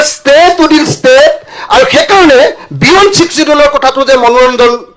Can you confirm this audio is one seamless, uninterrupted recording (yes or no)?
yes